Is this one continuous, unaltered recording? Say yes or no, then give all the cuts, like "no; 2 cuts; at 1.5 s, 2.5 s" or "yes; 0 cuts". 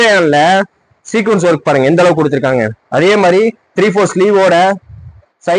yes; 0 cuts